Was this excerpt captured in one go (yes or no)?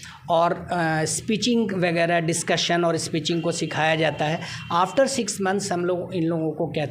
yes